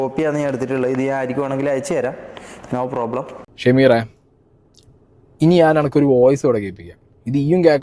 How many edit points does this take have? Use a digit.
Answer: 1